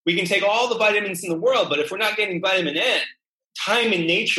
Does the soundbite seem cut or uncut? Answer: cut